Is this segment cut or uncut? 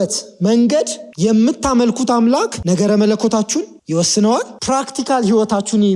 cut